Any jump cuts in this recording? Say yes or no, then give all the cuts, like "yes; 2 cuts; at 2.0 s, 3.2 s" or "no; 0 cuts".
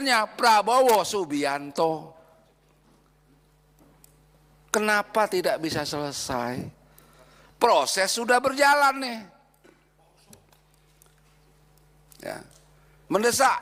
no; 0 cuts